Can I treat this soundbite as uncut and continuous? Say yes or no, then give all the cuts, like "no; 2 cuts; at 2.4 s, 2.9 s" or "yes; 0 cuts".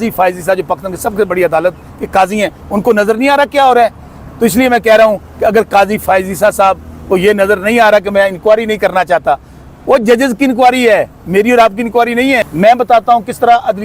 no; 1 cut; at 12.5 s